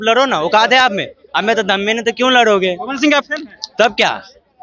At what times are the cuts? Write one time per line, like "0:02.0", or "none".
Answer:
none